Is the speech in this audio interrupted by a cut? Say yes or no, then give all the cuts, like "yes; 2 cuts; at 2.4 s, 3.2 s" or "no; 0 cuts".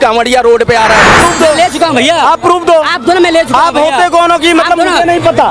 yes; 1 cut; at 1.2 s